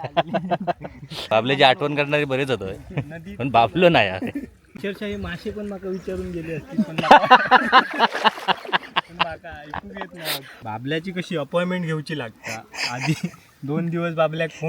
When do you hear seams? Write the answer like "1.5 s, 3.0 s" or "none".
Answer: 1.3 s, 10.5 s